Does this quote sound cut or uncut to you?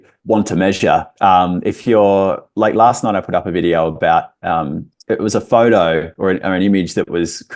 uncut